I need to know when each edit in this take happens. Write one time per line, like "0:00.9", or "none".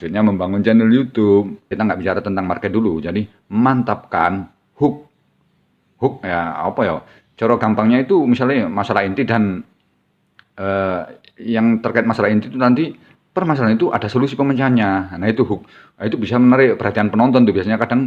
0:01.7